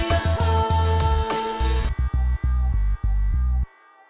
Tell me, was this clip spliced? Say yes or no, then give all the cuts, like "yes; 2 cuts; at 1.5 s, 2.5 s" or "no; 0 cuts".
yes; 1 cut; at 1.5 s